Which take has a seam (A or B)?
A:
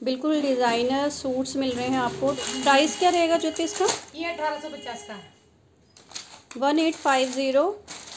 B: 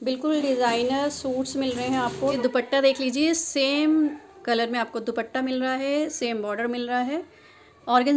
B